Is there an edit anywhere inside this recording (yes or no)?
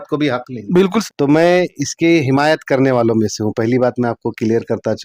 yes